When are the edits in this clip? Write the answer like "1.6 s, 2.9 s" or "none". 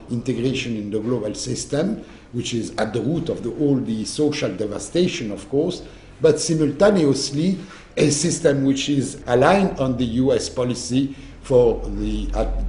none

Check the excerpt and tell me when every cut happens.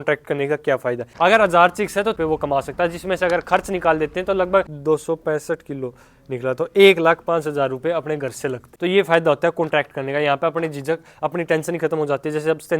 1.1 s, 2.2 s, 4.7 s, 8.7 s

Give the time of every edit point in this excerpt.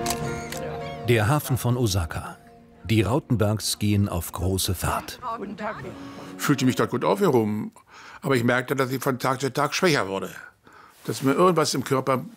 5.8 s

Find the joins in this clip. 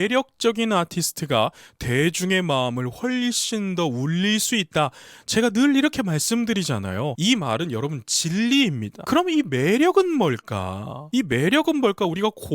7.1 s, 8.9 s

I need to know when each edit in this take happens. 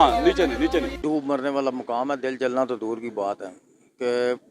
0.9 s

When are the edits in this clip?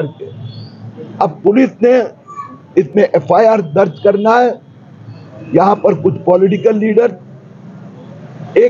none

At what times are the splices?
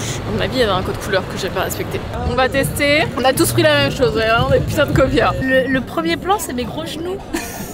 2.2 s, 5.4 s

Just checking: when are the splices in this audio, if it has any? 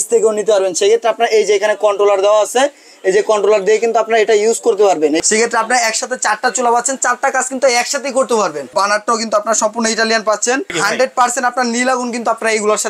5.2 s, 8.7 s, 10.8 s

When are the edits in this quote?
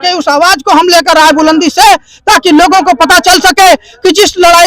none

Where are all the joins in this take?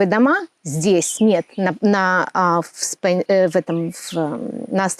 none

